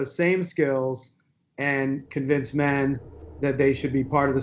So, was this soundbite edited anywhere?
no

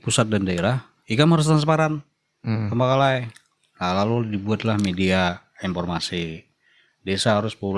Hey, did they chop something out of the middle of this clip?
no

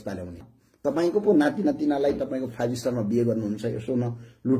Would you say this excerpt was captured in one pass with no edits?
no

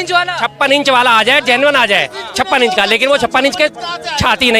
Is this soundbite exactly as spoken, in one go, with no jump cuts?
yes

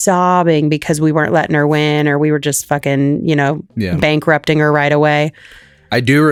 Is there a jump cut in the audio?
no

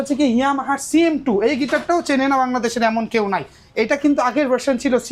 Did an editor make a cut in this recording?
no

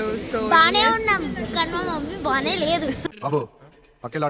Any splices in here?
no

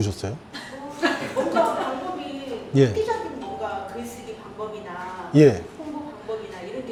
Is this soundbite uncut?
yes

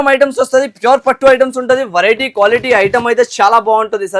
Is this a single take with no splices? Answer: yes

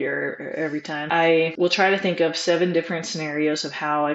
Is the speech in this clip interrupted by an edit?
yes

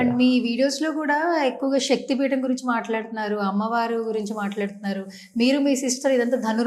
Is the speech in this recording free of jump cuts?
yes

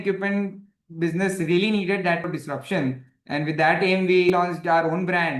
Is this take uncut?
no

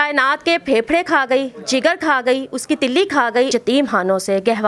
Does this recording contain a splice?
yes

